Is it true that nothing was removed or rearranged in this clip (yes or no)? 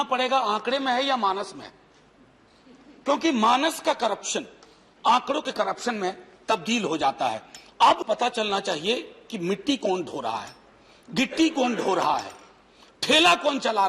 no